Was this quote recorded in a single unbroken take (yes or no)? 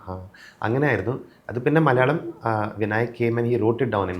yes